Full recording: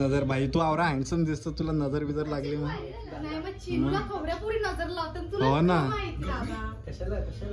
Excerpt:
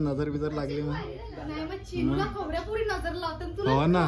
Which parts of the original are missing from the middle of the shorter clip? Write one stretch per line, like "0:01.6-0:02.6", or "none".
none